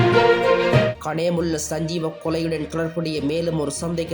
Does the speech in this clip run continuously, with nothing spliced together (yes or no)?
yes